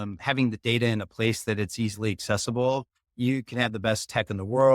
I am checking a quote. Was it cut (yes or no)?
yes